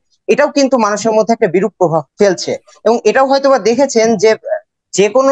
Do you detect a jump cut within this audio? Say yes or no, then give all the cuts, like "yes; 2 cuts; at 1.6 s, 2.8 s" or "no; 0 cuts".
yes; 1 cut; at 2.1 s